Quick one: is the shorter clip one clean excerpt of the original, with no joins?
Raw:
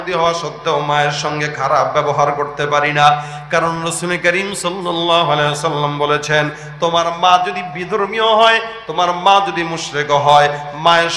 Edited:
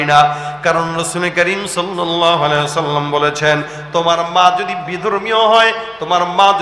yes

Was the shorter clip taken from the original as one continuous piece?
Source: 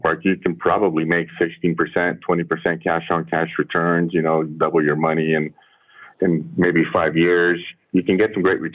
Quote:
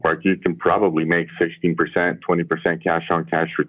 yes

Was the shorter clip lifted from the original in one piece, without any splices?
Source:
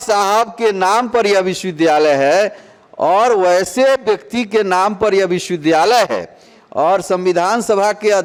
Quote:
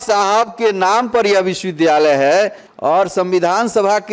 no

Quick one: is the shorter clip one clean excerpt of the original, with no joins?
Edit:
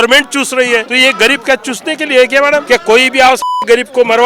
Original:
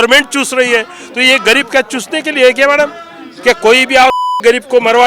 no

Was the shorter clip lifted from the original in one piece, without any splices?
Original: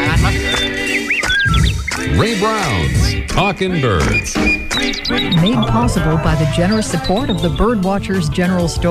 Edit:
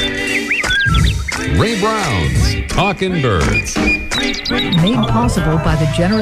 yes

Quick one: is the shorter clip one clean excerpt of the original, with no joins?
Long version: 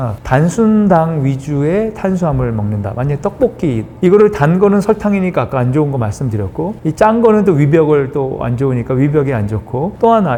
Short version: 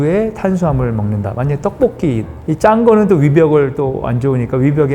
no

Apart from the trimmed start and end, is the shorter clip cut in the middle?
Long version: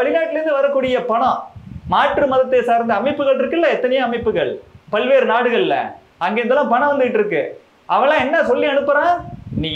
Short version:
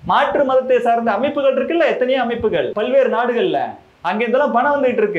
yes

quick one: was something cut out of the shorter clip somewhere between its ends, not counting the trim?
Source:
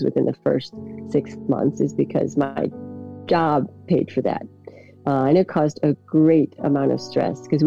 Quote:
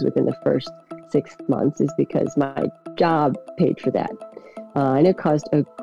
yes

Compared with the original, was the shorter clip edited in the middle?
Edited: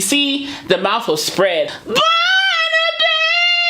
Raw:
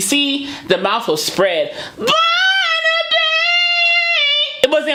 yes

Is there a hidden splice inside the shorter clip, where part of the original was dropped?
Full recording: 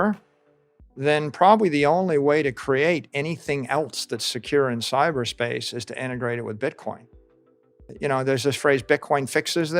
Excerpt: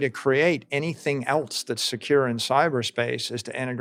no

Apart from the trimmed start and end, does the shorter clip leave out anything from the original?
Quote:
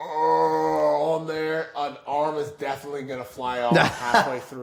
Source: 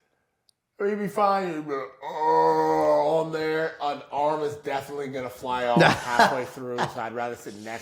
no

